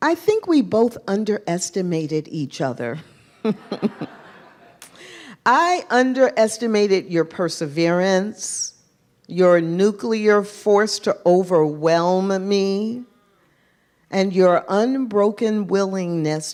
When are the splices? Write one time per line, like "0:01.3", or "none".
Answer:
none